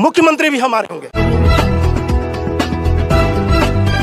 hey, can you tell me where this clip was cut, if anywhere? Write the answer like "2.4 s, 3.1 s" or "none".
none